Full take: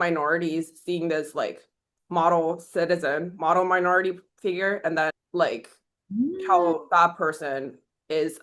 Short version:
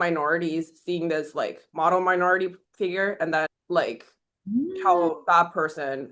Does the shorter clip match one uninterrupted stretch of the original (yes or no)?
no